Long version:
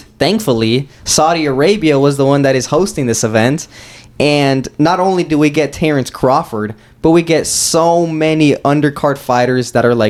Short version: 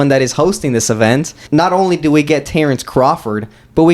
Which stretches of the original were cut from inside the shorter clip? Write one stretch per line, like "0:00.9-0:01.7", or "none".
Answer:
0:03.8-0:04.7